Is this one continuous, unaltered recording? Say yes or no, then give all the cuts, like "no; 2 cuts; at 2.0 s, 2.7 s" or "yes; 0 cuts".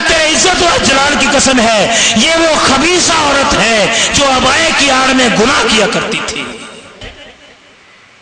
no; 1 cut; at 7.0 s